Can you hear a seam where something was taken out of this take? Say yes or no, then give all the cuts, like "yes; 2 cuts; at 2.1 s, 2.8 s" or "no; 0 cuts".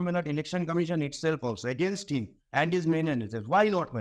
no; 0 cuts